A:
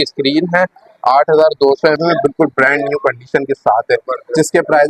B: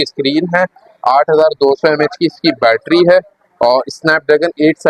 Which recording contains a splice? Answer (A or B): A